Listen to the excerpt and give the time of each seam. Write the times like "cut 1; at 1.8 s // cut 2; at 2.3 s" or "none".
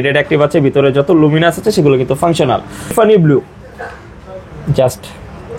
cut 1; at 3.1 s